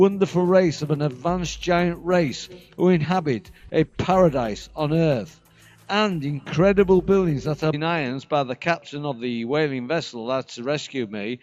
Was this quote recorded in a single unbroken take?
yes; 0 cuts

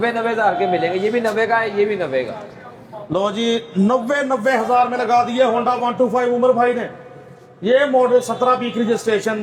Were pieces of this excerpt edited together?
no; 0 cuts

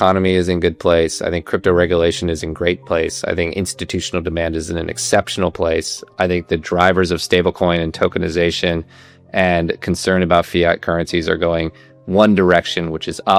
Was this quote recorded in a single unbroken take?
yes; 0 cuts

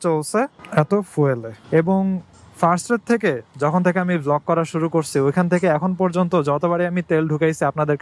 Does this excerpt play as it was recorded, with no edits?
no; 1 cut; at 1.5 s

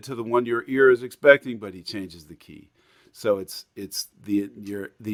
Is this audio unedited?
yes; 0 cuts

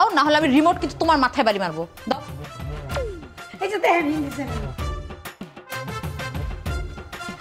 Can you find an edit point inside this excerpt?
no; 0 cuts

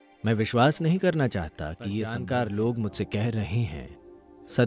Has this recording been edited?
yes; 1 cut; at 2.2 s

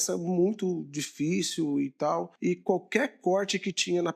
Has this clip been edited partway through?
yes; 1 cut; at 2.3 s

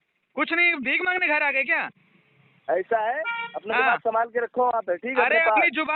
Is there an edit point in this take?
no; 0 cuts

